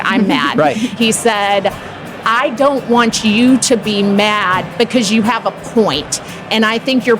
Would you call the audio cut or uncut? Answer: cut